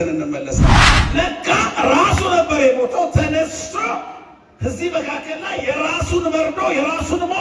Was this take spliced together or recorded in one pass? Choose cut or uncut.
cut